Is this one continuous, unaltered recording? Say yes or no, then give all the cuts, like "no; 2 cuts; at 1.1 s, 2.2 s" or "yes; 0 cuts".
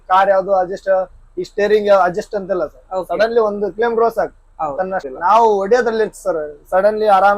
no; 1 cut; at 5.1 s